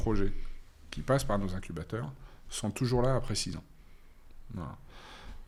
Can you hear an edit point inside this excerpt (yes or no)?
no